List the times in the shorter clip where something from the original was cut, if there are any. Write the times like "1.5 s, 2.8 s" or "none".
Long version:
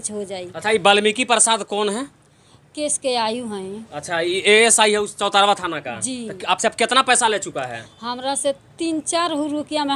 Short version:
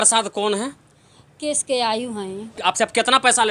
2.5 s